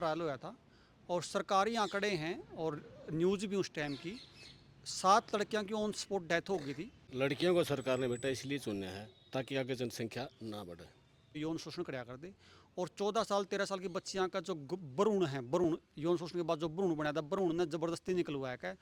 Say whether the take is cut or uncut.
cut